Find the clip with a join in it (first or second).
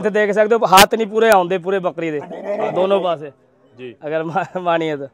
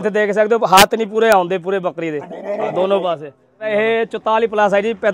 second